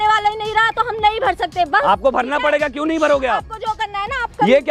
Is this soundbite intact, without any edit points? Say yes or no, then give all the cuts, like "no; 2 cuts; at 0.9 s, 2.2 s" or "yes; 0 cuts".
yes; 0 cuts